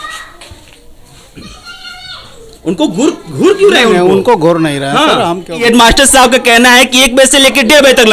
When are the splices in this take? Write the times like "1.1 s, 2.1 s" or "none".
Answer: 5.6 s